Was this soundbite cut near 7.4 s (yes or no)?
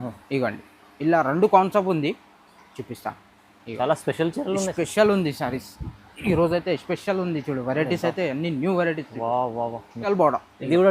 no